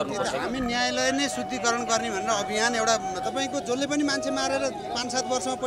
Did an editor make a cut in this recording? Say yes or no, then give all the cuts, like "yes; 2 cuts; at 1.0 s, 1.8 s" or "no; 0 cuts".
yes; 1 cut; at 3.2 s